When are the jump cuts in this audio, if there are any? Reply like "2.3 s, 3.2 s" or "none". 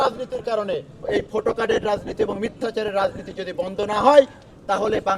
0.9 s